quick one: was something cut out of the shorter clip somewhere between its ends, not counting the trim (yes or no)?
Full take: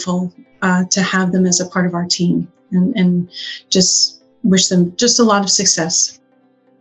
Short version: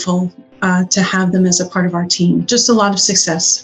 yes